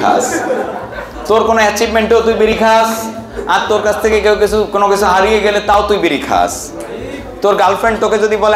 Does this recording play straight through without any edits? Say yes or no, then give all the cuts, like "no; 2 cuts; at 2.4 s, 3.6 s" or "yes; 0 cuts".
yes; 0 cuts